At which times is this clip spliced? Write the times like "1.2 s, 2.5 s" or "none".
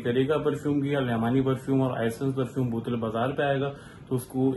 none